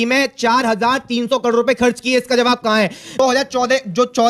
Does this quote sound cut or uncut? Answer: cut